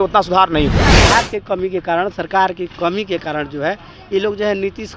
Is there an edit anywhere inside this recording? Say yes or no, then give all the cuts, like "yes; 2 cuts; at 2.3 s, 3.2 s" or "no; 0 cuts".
yes; 1 cut; at 1.0 s